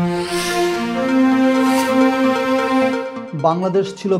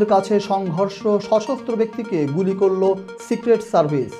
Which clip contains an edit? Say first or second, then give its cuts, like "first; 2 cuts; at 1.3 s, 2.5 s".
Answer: first; 1 cut; at 3.1 s